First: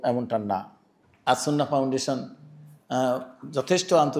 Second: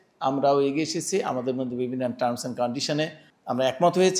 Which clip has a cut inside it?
second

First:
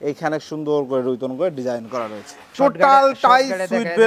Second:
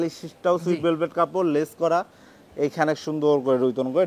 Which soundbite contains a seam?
first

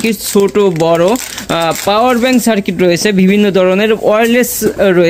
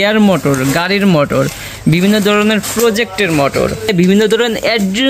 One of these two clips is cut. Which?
second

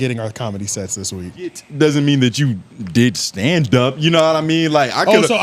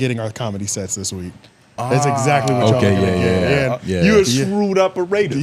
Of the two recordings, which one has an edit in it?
first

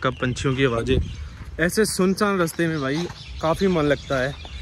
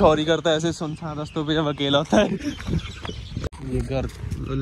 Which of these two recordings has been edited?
second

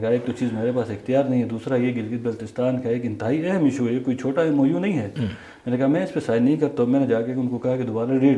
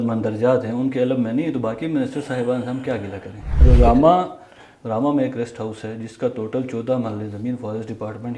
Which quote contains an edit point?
second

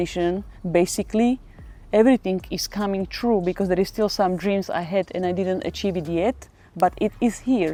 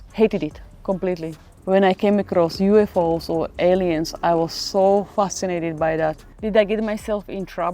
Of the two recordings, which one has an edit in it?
second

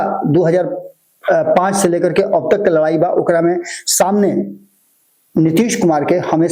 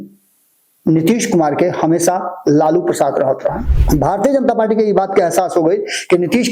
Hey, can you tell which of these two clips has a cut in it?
second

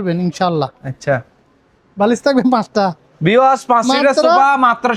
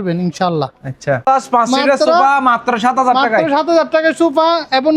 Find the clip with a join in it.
second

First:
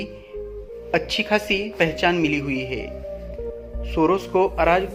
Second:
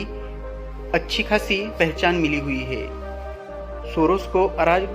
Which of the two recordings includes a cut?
second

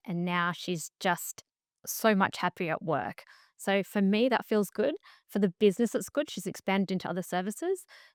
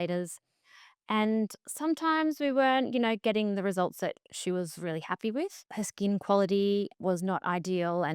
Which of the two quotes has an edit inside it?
second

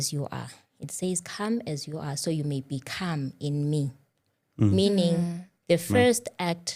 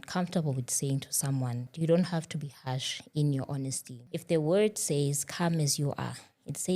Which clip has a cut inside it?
second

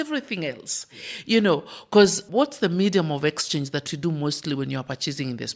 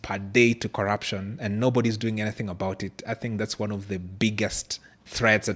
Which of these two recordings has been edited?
first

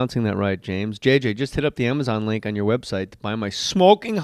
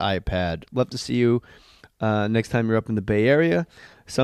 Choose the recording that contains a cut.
first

